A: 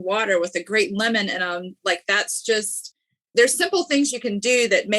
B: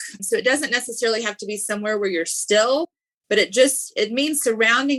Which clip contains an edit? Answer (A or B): A